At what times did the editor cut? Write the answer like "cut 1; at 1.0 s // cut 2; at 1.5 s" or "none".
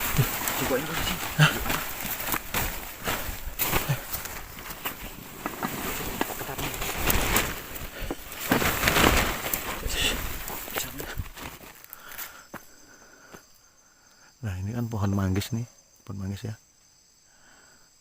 cut 1; at 11.6 s